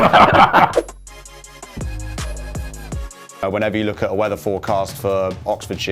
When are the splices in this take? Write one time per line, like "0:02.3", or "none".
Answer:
0:03.4

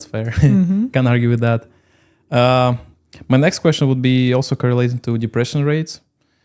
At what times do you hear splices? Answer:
none

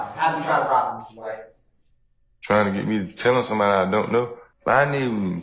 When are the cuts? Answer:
0:04.4

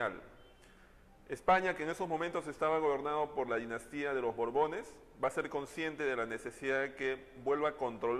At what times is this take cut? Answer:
0:03.9

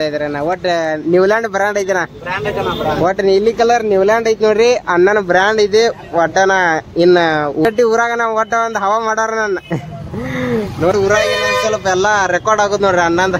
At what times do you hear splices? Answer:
0:07.6
0:10.9

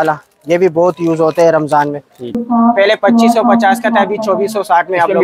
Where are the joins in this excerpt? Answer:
0:02.4

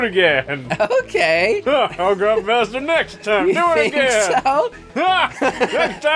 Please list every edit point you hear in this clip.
0:01.6

